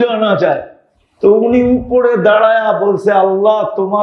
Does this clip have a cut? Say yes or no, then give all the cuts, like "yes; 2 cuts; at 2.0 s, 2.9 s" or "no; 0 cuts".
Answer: no; 0 cuts